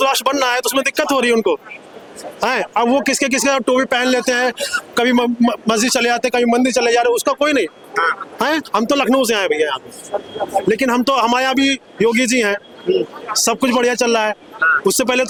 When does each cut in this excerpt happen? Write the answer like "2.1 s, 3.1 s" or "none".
none